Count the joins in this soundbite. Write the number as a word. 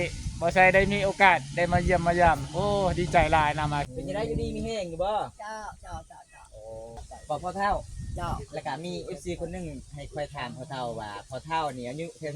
two